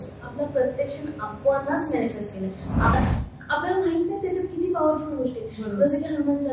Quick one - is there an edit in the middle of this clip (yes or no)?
yes